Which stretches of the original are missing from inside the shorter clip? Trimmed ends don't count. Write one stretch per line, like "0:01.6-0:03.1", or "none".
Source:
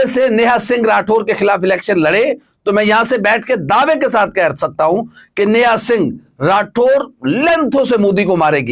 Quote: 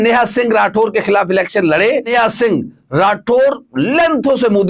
0:02.4-0:05.6